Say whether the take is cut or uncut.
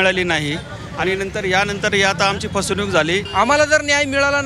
cut